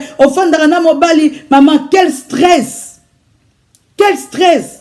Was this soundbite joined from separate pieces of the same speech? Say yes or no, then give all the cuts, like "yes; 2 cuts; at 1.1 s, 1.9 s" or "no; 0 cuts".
no; 0 cuts